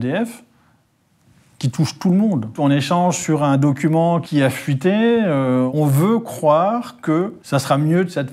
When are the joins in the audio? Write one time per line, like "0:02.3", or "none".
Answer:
0:02.6
0:04.2
0:05.7
0:07.4